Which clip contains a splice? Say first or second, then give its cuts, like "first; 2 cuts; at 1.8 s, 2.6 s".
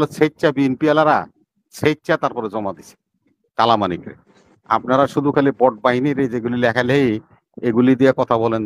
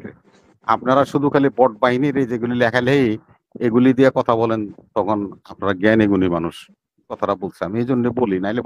second; 1 cut; at 7.2 s